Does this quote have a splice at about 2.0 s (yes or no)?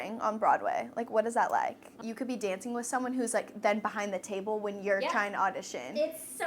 yes